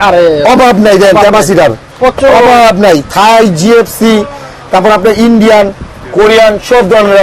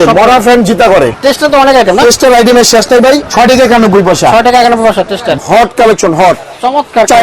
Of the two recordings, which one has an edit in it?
second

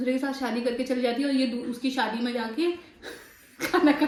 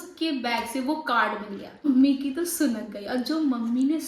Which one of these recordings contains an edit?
second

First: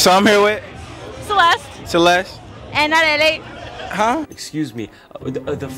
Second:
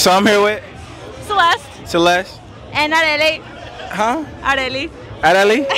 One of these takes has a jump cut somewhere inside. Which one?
second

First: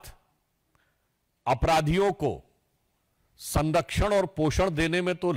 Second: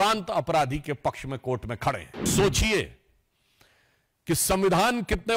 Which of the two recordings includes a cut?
second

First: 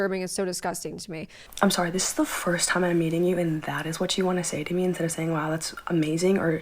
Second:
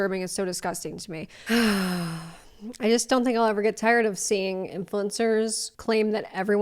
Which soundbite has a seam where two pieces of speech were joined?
second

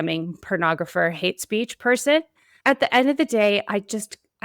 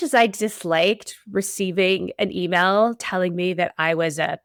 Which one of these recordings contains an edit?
first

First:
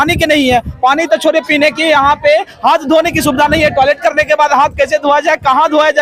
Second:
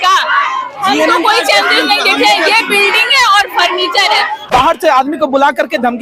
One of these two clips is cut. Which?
second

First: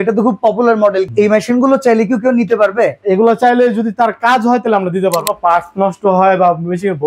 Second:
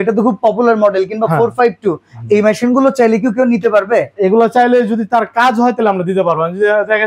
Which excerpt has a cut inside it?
first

